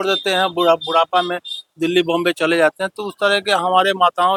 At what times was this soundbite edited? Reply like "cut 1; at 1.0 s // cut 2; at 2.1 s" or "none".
none